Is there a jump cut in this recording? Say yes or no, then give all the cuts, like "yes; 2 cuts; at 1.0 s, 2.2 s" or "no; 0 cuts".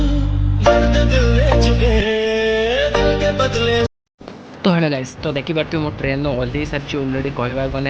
no; 0 cuts